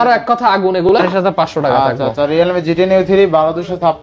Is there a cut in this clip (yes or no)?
yes